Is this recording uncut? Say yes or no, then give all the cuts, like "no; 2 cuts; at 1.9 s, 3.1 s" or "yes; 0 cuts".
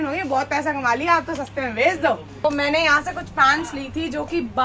no; 1 cut; at 2.4 s